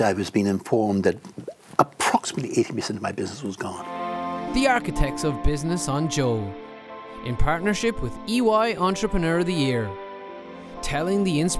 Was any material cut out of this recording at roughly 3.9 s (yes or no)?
yes